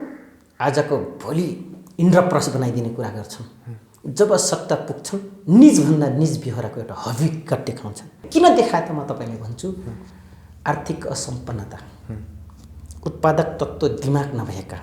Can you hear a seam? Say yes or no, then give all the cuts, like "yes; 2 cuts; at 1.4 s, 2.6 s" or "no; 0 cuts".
yes; 1 cut; at 8.2 s